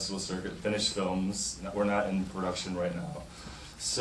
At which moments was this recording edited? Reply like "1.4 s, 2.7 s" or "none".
1.6 s